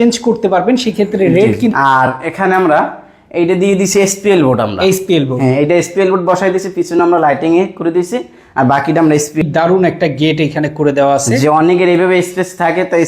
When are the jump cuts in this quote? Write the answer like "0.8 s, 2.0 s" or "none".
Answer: 1.7 s, 9.4 s